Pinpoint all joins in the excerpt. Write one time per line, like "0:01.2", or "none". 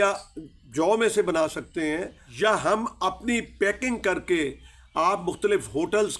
0:02.2